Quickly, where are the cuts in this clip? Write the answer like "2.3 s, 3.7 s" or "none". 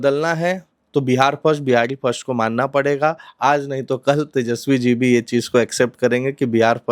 none

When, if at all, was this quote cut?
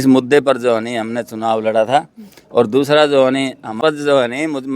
3.8 s

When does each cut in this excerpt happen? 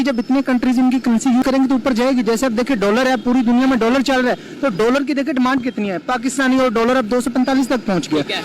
1.4 s

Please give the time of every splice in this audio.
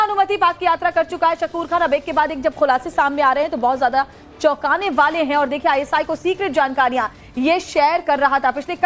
6.5 s

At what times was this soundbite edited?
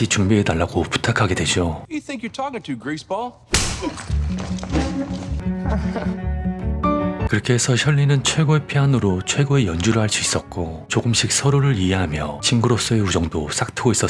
5.3 s, 7.3 s

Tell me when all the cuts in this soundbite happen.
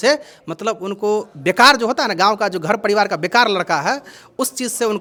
none

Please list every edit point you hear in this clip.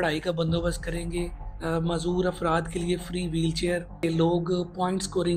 1.4 s, 3.9 s

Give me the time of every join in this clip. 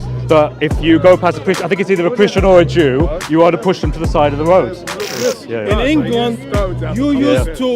5.1 s

